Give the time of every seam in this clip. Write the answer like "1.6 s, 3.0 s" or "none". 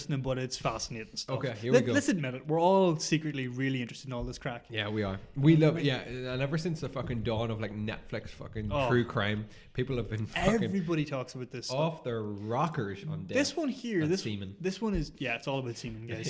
none